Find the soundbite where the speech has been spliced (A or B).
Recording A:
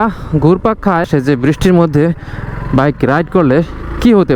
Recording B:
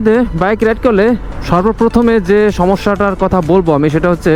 A